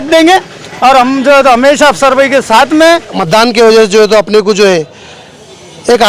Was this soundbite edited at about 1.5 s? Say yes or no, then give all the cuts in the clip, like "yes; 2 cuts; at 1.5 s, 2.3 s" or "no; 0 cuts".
no; 1 cut; at 3.1 s